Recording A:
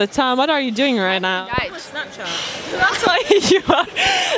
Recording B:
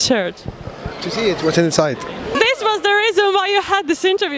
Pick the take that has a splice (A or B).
B